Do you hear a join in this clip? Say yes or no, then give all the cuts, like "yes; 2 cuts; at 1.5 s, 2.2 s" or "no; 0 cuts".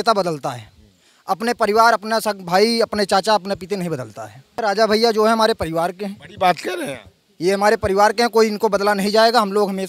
yes; 1 cut; at 4.6 s